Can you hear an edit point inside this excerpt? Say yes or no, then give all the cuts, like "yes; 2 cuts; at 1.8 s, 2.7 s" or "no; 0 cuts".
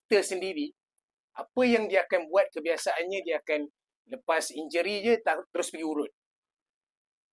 no; 0 cuts